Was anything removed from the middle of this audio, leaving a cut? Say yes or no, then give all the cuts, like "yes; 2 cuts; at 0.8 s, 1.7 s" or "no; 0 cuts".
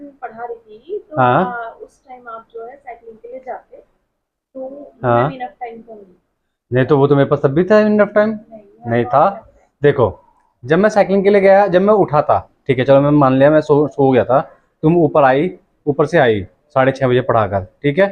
no; 0 cuts